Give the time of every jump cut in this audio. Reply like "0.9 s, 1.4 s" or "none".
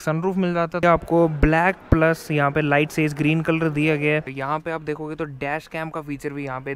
0.8 s, 4.3 s